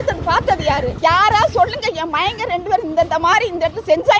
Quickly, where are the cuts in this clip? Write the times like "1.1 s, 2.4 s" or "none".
0.9 s